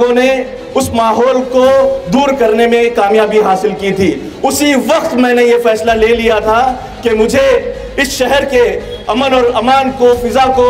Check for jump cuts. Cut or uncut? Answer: uncut